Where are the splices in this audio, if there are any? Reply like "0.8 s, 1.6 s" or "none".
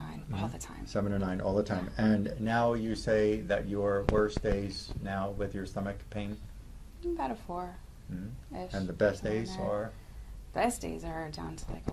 none